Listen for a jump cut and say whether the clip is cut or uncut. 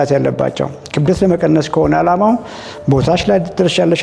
uncut